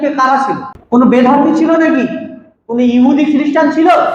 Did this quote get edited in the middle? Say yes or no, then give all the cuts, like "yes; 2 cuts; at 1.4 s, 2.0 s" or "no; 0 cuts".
no; 0 cuts